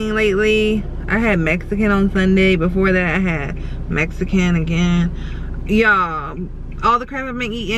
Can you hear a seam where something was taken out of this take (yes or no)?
no